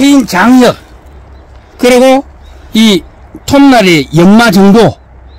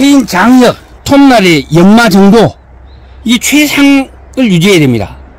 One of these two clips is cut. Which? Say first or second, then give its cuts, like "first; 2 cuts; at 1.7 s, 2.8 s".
second; 1 cut; at 0.9 s